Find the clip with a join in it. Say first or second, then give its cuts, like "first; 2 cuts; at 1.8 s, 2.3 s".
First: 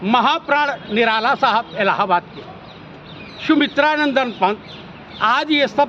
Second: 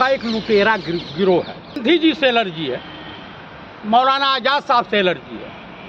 second; 1 cut; at 1.8 s